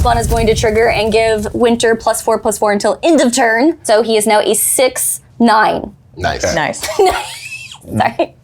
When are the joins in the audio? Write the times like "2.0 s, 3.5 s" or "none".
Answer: 3.8 s